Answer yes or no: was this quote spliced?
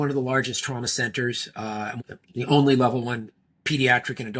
yes